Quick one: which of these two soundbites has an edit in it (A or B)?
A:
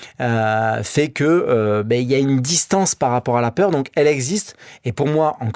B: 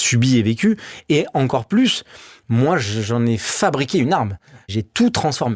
B